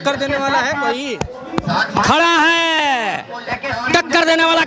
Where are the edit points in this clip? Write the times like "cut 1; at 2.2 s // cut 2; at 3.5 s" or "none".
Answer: none